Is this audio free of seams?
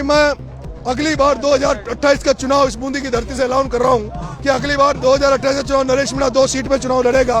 yes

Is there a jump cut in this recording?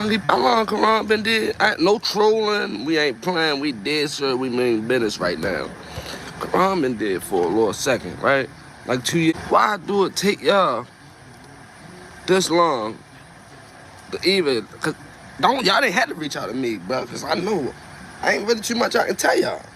yes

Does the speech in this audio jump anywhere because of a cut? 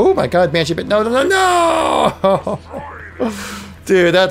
no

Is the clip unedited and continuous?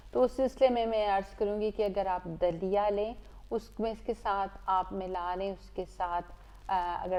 yes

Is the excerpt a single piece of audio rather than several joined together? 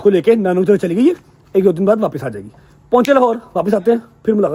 yes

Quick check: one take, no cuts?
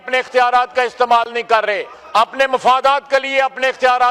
no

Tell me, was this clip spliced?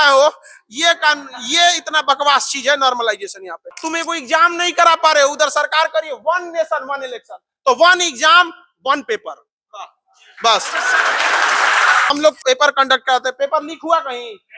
yes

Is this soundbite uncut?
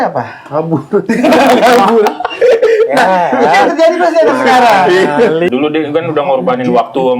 no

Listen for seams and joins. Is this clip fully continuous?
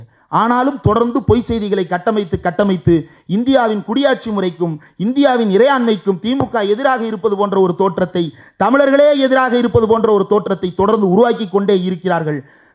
yes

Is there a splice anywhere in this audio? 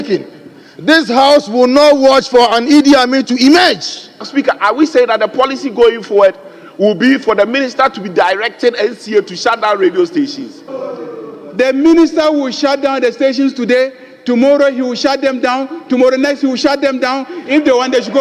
yes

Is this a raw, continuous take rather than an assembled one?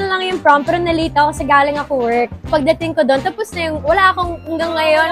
yes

